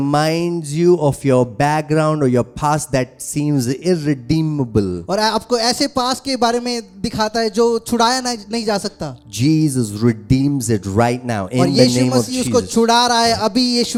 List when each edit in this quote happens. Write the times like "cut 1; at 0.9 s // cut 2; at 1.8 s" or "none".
none